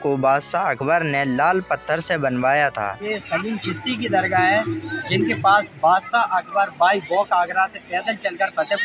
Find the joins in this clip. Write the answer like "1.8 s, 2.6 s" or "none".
3.1 s